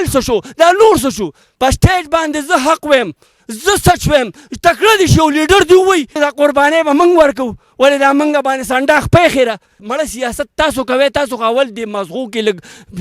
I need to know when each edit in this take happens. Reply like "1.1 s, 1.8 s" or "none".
1.4 s, 6.1 s, 9.8 s

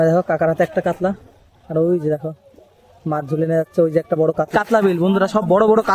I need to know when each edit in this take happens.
4.5 s

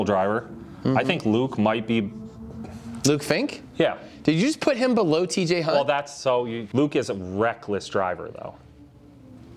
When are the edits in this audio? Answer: 6.6 s

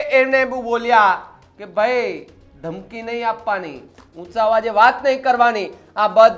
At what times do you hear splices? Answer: none

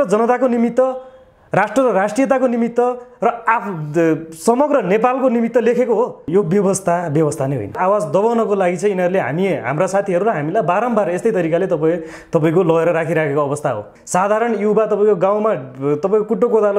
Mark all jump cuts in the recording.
6.3 s, 7.8 s, 13.9 s

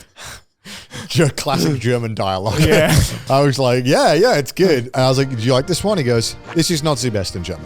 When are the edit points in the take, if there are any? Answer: 3.2 s, 4.9 s, 6.4 s

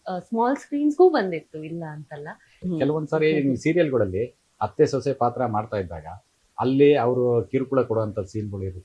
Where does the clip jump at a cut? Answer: 2.6 s

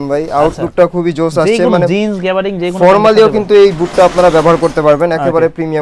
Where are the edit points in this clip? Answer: none

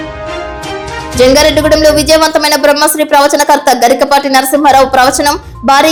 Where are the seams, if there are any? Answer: none

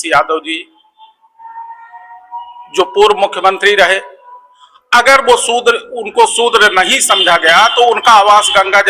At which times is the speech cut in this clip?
none

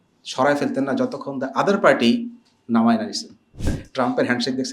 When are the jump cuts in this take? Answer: 3.8 s

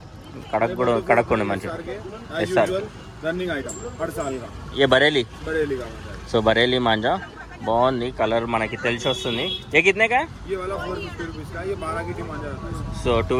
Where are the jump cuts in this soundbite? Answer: none

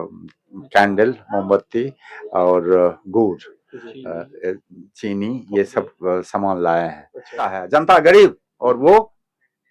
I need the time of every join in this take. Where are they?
7.6 s

